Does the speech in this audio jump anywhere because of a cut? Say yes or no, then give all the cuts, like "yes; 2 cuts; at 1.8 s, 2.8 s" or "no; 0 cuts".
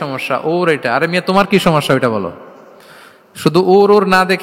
no; 0 cuts